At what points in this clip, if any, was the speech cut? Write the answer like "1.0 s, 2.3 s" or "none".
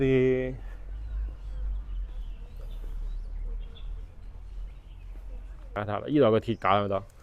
5.8 s